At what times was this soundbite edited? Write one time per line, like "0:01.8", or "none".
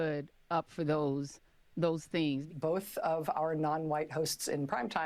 0:02.5